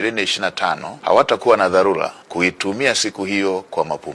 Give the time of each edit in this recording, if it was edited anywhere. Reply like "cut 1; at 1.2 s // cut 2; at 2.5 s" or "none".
cut 1; at 0.9 s // cut 2; at 2.2 s